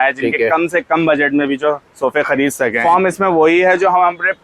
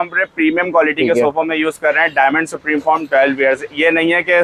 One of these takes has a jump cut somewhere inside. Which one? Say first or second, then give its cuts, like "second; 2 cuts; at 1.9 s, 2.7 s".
first; 1 cut; at 2.8 s